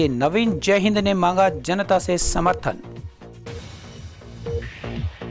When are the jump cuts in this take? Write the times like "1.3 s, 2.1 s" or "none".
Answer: 2.8 s